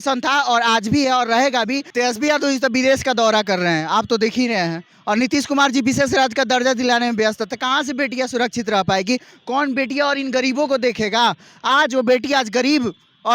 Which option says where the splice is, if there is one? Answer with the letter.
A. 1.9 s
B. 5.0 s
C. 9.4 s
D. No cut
A